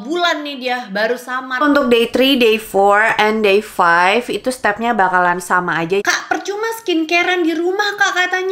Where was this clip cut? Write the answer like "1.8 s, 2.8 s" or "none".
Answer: 1.6 s, 6.0 s